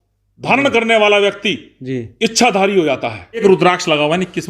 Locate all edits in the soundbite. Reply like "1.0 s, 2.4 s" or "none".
3.4 s